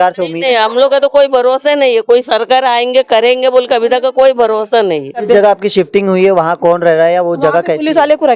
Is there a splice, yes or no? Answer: yes